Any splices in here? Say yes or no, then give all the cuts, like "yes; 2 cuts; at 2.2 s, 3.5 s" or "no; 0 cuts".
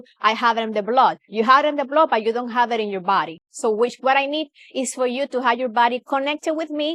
no; 0 cuts